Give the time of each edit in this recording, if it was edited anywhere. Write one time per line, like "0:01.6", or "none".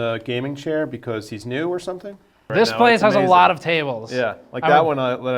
0:02.4